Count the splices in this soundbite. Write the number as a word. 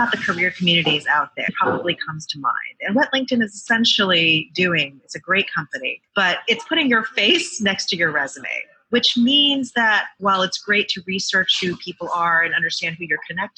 one